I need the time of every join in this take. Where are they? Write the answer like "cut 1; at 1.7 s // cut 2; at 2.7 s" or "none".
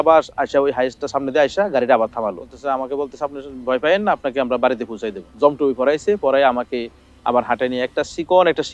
cut 1; at 2.6 s // cut 2; at 5.2 s

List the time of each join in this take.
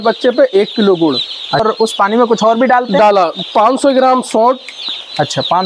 cut 1; at 1.6 s

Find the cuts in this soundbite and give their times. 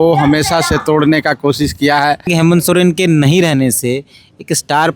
cut 1; at 2.3 s

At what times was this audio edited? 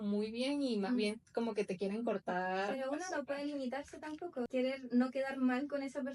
cut 1; at 4.5 s

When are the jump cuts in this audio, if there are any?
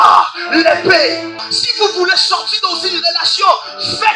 cut 1; at 1.5 s

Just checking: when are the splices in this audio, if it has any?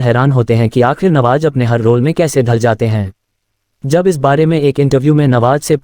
cut 1; at 3.7 s

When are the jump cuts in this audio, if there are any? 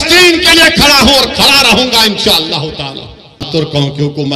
cut 1; at 3.4 s

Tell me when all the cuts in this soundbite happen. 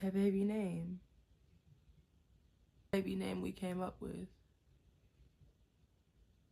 cut 1; at 2.9 s

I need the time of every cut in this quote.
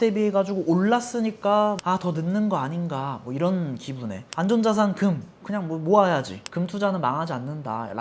cut 1; at 1.8 s // cut 2; at 4.3 s // cut 3; at 6.4 s

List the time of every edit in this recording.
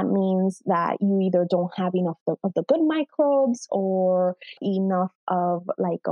cut 1; at 4.6 s

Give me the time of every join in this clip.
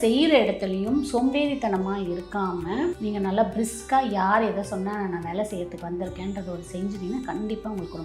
cut 1; at 3.0 s

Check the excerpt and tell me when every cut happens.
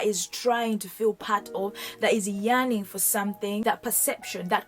cut 1; at 3.6 s

